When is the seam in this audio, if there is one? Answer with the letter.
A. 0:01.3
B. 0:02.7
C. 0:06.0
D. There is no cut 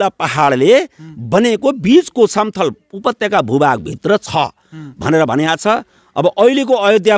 D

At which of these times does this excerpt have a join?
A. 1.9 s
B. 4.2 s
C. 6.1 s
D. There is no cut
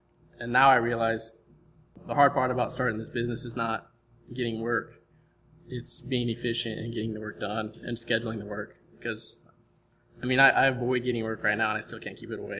A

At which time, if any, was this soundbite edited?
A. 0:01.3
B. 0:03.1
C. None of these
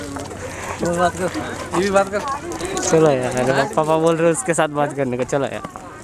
C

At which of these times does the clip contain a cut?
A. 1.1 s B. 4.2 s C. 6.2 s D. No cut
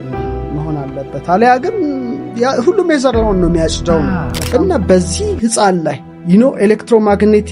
B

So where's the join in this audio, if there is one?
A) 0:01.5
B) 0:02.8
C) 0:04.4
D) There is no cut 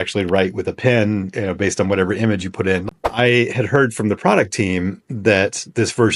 B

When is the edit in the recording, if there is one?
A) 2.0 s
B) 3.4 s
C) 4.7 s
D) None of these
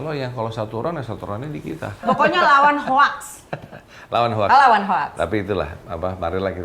A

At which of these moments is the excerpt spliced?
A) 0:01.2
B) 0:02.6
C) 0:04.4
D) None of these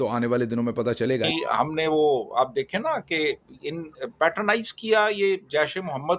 A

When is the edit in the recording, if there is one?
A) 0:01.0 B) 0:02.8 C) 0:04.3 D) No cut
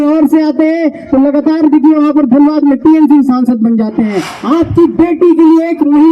C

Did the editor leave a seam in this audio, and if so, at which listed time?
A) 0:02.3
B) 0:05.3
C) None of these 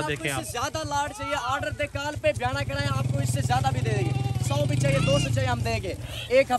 C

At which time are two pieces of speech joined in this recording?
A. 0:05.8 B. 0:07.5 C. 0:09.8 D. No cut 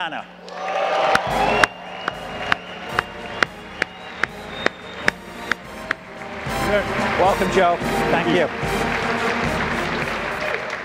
C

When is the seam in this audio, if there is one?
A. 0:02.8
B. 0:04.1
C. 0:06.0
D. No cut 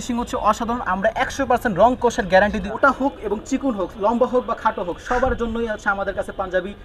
A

